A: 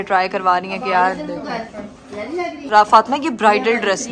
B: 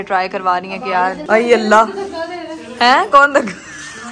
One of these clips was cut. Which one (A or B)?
B